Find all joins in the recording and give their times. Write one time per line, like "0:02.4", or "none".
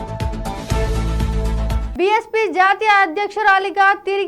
0:01.8